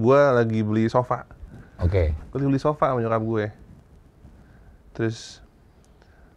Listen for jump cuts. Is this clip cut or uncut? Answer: cut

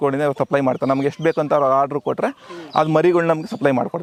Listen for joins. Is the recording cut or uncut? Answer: uncut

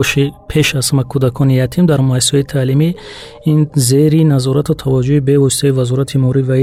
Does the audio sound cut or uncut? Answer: uncut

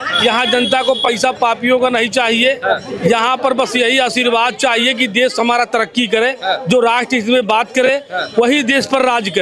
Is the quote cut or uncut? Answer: uncut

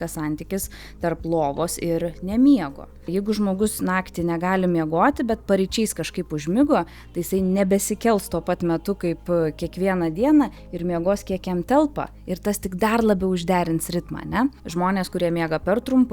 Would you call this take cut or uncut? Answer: cut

